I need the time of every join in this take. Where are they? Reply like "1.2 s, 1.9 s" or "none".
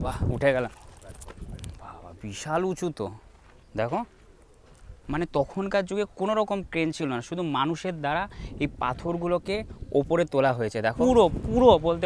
5.1 s, 11.0 s